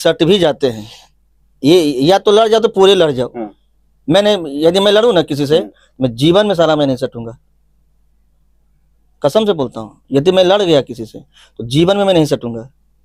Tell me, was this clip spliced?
no; 0 cuts

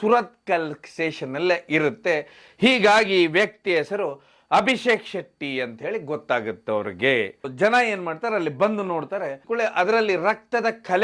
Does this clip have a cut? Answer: yes; 2 cuts; at 7.4 s, 9.4 s

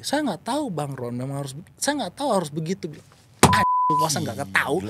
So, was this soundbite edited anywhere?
no; 0 cuts

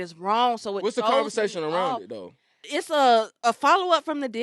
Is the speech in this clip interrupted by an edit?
yes; 1 cut; at 2.5 s

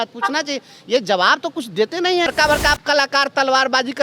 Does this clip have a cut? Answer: yes; 1 cut; at 2.3 s

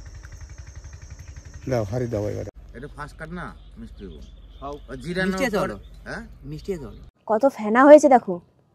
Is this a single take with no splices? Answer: no; 2 cuts; at 2.5 s, 7.1 s

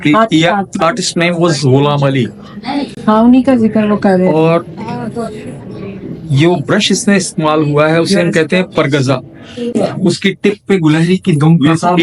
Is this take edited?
no; 0 cuts

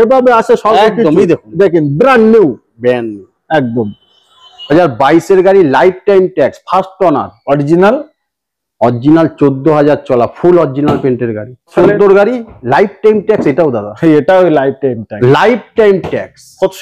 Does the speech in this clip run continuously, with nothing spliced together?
no; 3 cuts; at 4.7 s, 11.7 s, 15.1 s

